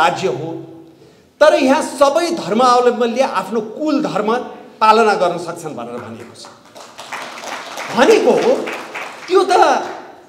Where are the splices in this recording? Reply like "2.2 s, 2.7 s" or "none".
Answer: none